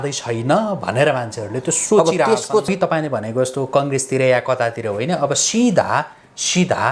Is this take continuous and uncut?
no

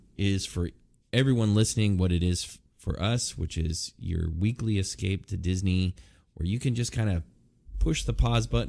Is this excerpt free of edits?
yes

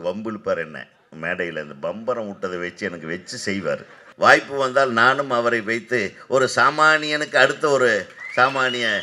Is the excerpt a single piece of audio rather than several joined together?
no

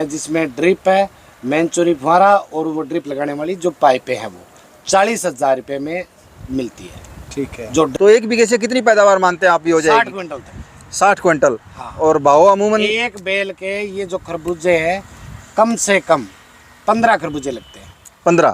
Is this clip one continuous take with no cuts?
no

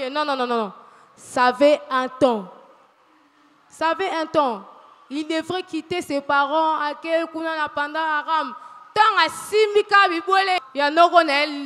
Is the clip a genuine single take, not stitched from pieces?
no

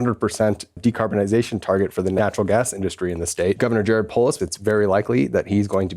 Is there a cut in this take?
yes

